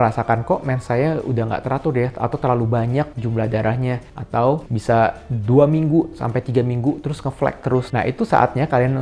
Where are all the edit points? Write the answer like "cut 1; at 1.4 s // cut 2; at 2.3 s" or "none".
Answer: none